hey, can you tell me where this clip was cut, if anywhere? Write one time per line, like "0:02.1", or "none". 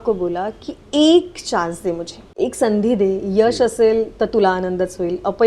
0:02.3